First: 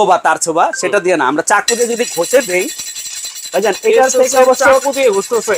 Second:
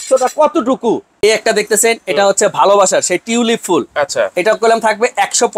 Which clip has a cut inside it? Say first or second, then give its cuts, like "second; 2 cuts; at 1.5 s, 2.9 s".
second; 1 cut; at 1.1 s